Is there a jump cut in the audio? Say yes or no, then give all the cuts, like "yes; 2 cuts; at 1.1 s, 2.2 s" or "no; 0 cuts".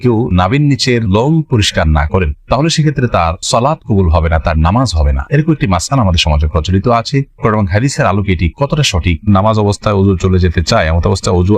yes; 1 cut; at 9.3 s